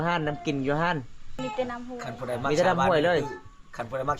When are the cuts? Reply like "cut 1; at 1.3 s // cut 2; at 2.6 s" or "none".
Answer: cut 1; at 1.3 s

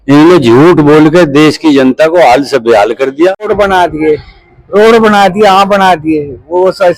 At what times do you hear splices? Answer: cut 1; at 3.5 s

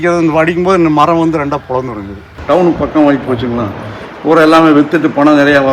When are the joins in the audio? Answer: cut 1; at 2.3 s

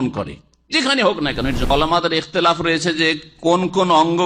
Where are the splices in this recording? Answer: cut 1; at 1.7 s

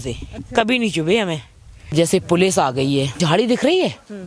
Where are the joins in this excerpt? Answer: cut 1; at 1.9 s // cut 2; at 3.2 s

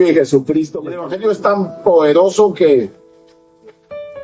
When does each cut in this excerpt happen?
cut 1; at 1.1 s

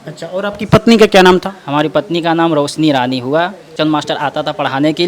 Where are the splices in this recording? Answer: cut 1; at 3.6 s

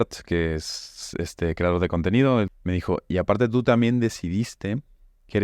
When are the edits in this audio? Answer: cut 1; at 2.6 s

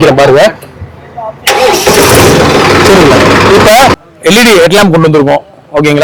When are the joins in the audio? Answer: cut 1; at 3.9 s

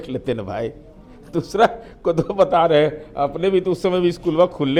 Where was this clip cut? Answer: none

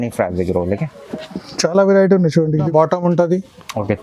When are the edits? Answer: cut 1; at 2.7 s

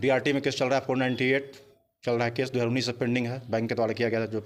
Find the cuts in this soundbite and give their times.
none

